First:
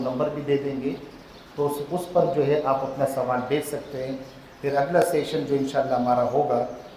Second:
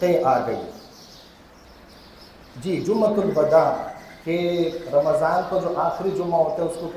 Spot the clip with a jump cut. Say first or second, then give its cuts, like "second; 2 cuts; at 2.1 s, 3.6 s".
second; 1 cut; at 1.6 s